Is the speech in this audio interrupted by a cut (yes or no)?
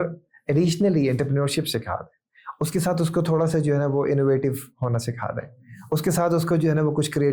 no